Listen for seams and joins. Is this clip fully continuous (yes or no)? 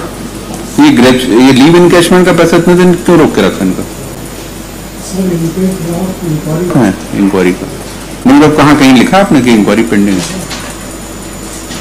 no